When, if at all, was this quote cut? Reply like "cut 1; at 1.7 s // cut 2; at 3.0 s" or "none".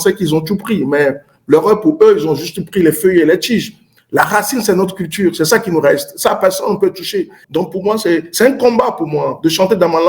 cut 1; at 7.4 s

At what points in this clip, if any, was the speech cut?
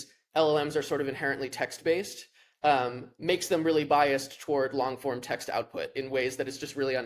none

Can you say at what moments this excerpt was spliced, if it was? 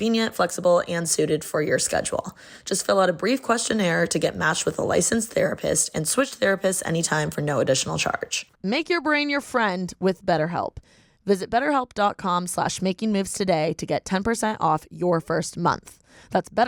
none

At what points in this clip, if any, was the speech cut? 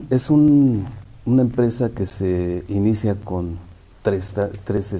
none

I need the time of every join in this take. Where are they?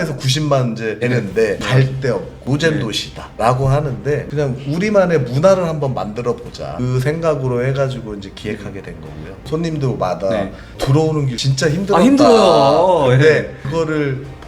cut 1; at 9.3 s

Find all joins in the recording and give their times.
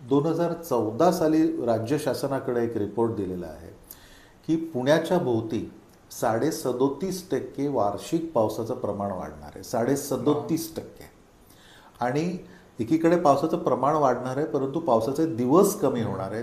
none

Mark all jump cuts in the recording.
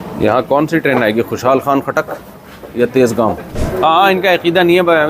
cut 1; at 3.5 s

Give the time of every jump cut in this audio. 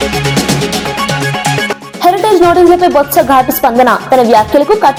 none

